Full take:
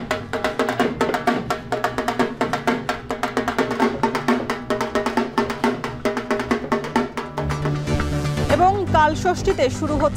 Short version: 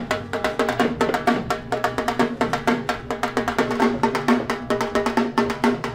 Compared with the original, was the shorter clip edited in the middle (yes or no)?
no